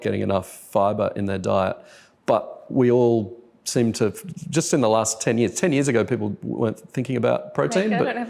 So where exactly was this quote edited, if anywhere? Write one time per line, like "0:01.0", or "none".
none